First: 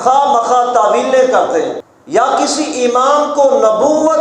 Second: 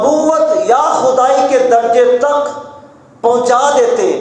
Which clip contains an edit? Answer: first; 1 cut; at 1.9 s

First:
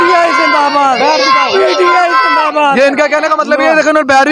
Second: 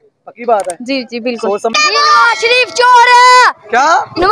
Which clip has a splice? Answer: second; 1 cut; at 1.8 s

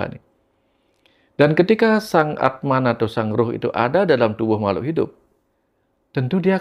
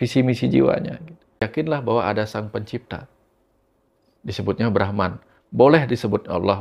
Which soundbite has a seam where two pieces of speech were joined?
second; 1 cut; at 1.4 s

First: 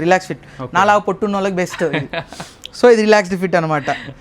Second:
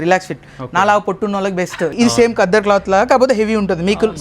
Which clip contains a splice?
second; 1 cut; at 1.9 s

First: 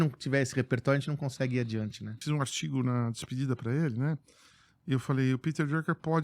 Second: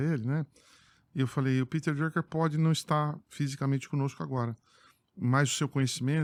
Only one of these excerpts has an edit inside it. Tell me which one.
first; 1 cut; at 2.2 s

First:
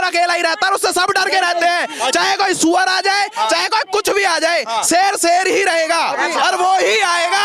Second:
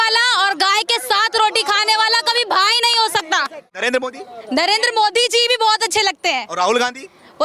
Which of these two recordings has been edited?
second; 1 cut; at 3.8 s

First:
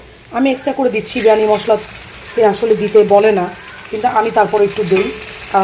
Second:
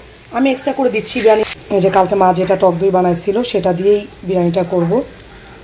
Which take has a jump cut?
second; 1 cut; at 1.4 s

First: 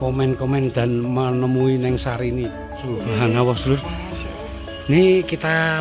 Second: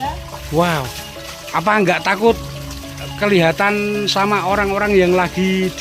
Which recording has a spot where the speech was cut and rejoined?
first; 1 cut; at 2.9 s

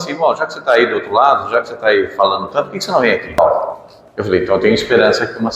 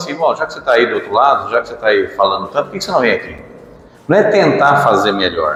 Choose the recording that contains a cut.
first; 1 cut; at 3.4 s

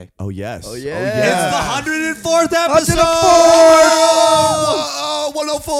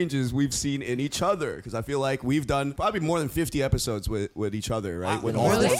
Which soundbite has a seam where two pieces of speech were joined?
second; 1 cut; at 2.7 s

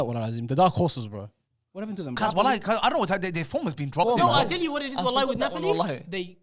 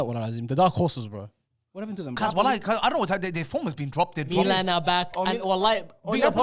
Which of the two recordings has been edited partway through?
first; 1 cut; at 4.1 s

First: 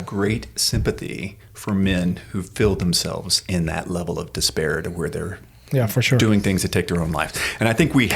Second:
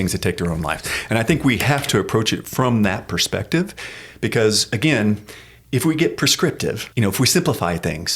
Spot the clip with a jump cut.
second; 1 cut; at 6.8 s

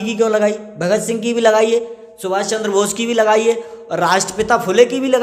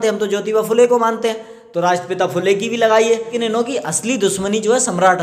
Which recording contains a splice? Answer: second; 1 cut; at 3.3 s

